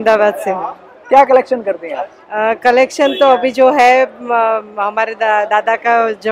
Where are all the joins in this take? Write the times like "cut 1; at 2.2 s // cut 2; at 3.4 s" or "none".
none